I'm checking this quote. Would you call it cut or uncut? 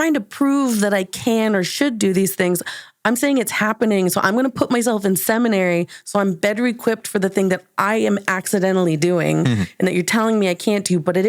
uncut